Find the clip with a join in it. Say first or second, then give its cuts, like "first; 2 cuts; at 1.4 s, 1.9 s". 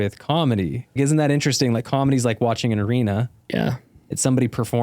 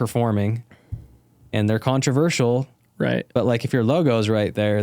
first; 1 cut; at 1.0 s